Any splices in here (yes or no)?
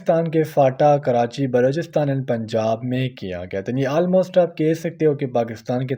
no